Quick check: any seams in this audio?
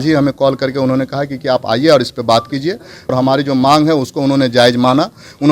yes; 1 cut; at 3.1 s

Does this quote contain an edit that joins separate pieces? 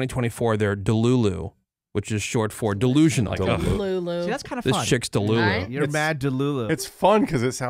yes; 2 cuts; at 3.3 s, 6.7 s

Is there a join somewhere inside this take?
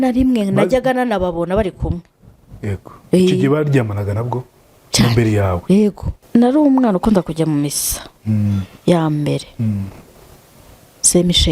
yes; 1 cut; at 6.1 s

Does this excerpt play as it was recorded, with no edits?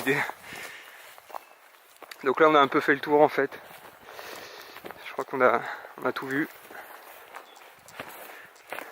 no; 1 cut; at 5.4 s

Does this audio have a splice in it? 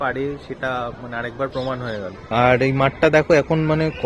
yes; 1 cut; at 2.3 s

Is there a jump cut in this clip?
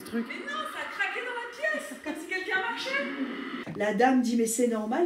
yes; 1 cut; at 3.6 s

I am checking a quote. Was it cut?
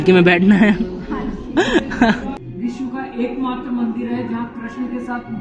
yes; 1 cut; at 2.4 s

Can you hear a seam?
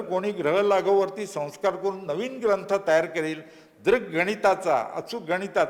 no; 0 cuts

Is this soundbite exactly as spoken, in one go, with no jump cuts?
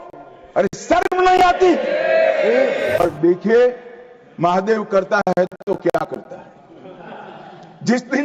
no; 1 cut; at 3.0 s

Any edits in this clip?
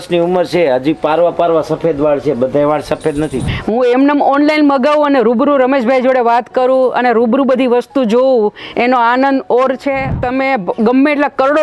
yes; 2 cuts; at 3.4 s, 10.2 s

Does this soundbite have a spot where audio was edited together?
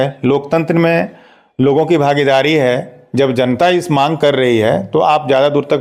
no; 0 cuts

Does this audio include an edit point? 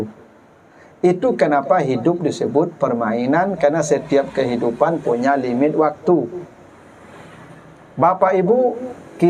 no; 0 cuts

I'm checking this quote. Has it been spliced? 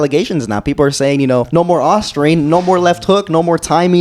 yes; 1 cut; at 1.5 s

